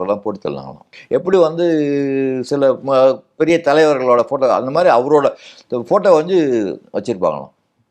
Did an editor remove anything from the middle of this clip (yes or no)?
yes